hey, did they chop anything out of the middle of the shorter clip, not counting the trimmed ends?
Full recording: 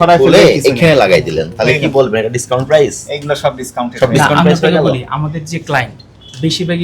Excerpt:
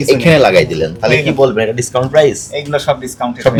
no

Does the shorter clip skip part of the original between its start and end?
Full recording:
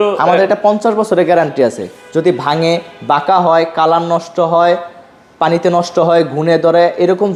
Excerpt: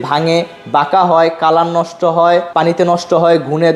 yes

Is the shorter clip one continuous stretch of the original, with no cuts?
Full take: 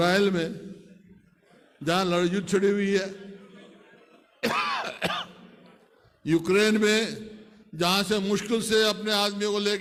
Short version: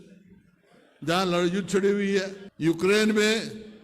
no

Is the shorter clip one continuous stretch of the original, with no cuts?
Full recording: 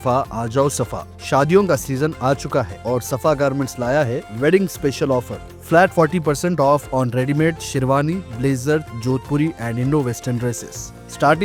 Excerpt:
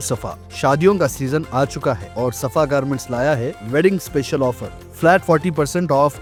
yes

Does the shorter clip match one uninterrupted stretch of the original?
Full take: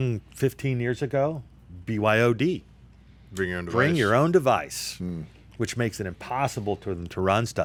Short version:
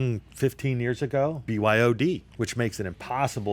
no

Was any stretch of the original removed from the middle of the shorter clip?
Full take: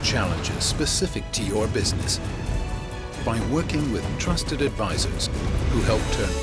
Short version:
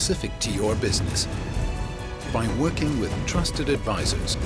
no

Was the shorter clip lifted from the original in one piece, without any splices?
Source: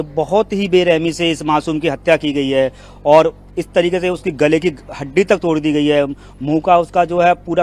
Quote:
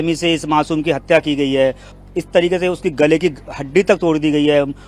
no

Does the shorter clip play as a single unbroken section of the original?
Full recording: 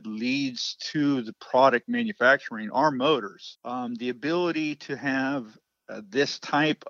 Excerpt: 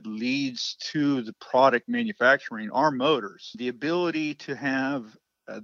no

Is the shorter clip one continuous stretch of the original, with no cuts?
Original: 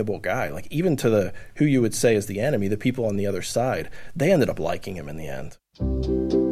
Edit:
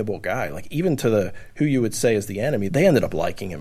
no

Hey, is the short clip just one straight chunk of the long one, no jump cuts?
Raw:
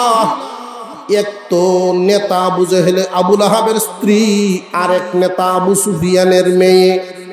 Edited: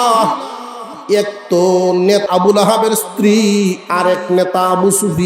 no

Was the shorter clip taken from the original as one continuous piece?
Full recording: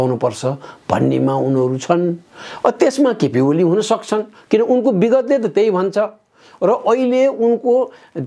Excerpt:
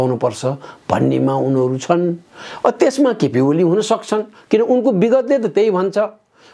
yes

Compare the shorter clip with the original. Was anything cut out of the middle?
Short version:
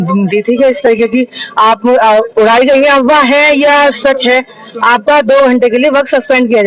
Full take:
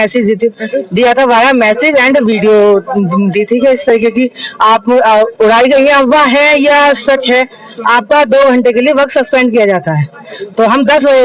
no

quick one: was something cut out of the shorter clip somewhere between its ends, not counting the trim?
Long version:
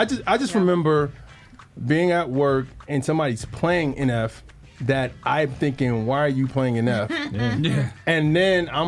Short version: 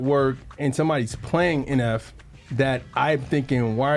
no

